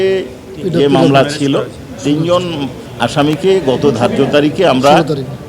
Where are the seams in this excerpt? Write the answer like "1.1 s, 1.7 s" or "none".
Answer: 2.8 s